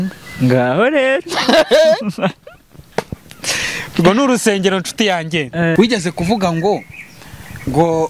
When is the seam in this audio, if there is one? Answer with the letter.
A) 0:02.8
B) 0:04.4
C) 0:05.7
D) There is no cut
C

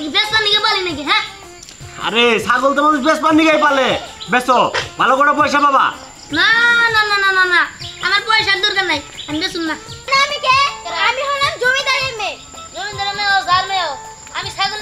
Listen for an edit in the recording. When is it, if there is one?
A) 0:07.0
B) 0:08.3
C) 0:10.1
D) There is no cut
C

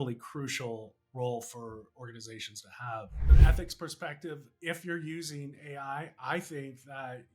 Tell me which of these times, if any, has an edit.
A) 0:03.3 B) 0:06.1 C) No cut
A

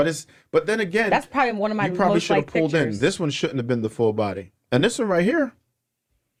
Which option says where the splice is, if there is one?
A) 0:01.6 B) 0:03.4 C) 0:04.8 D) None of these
D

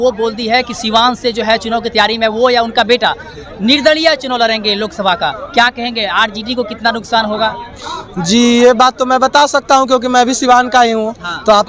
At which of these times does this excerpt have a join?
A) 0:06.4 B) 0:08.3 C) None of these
C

